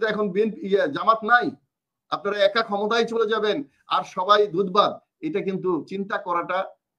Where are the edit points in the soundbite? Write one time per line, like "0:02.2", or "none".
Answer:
none

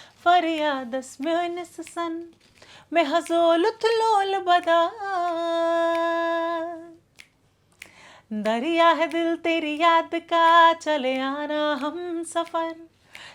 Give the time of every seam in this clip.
none

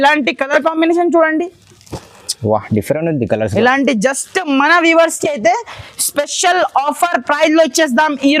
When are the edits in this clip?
none

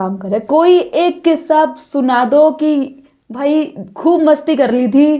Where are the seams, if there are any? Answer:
none

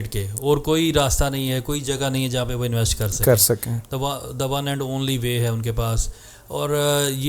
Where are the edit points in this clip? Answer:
none

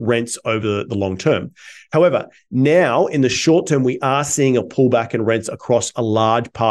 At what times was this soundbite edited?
none

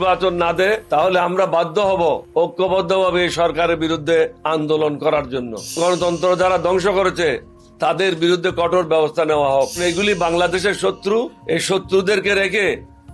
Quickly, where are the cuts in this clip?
0:00.8
0:02.2
0:04.4
0:05.7
0:09.8
0:11.4

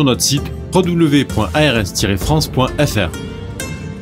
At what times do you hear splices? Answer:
0:03.1

